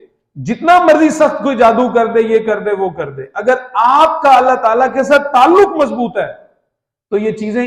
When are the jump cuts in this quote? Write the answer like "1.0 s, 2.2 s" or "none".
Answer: none